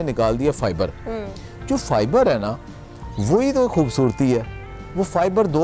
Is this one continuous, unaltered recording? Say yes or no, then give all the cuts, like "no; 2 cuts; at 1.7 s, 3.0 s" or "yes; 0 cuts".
yes; 0 cuts